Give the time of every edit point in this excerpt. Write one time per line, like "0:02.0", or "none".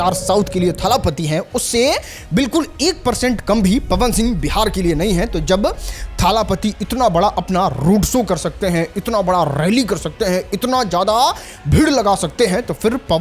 none